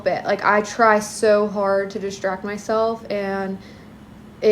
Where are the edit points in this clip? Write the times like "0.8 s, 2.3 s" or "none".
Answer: none

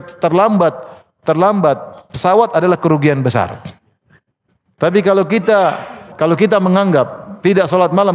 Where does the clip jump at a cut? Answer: 6.0 s

